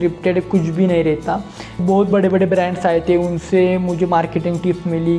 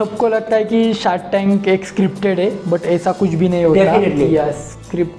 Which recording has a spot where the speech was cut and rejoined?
first; 1 cut; at 1.7 s

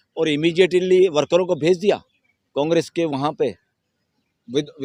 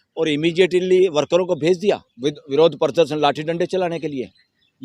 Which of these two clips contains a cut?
second; 1 cut; at 2.1 s

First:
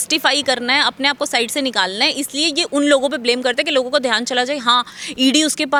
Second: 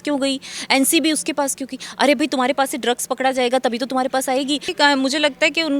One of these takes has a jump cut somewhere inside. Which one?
second; 1 cut; at 4.7 s

